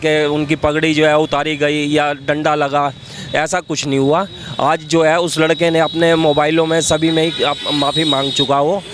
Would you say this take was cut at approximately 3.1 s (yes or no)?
no